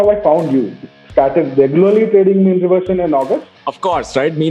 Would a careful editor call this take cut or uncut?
cut